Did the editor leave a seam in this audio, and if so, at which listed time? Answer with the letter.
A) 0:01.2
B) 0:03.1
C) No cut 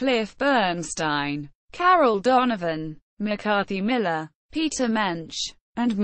C